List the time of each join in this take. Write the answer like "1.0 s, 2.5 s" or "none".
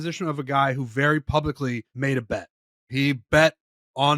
1.9 s

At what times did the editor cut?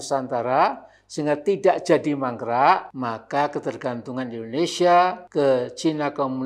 2.9 s, 5.2 s

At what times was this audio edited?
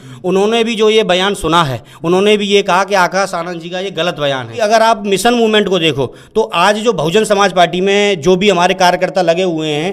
4.5 s

